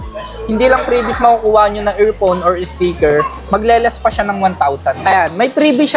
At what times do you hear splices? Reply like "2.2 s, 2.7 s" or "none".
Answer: 5.0 s